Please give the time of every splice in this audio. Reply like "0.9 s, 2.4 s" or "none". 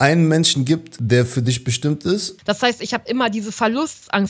0.9 s, 2.3 s

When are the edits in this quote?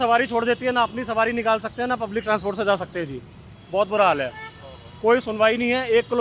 none

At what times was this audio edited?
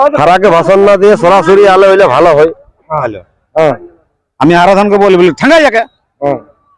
3.1 s

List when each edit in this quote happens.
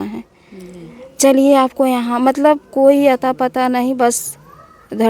none

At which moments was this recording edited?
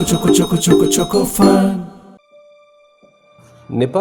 2.2 s

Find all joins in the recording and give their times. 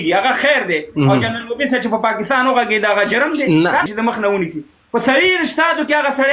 3.8 s

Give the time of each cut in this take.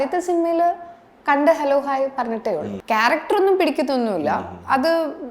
2.7 s

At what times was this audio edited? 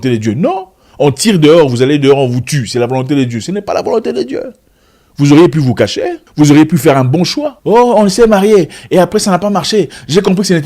6.2 s

